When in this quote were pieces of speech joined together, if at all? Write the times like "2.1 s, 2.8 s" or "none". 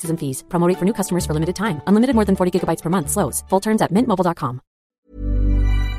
4.9 s